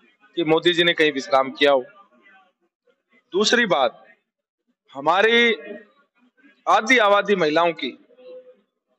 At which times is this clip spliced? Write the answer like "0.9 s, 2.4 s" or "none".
none